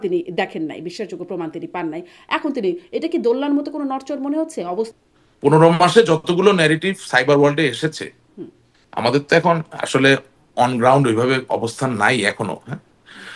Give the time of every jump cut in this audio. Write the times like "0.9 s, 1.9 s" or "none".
4.9 s